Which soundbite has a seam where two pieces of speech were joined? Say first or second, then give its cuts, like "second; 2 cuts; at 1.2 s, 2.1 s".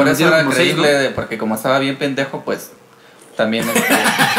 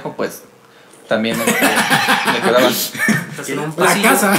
second; 1 cut; at 3.3 s